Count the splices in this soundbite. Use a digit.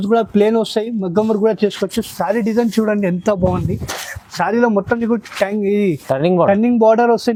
0